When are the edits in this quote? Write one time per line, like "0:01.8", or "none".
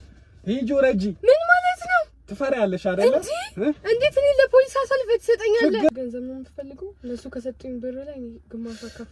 0:05.9